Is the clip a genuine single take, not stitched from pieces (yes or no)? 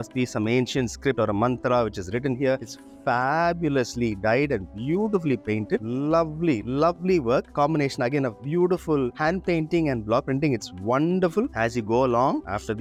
yes